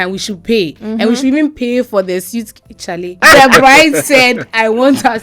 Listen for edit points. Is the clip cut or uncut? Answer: cut